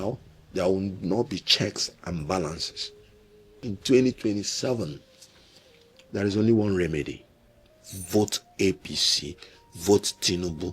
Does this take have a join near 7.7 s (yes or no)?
no